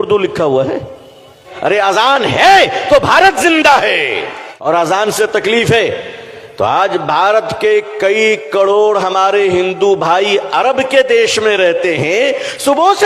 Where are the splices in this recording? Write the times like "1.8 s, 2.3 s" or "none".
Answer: 1.4 s, 4.7 s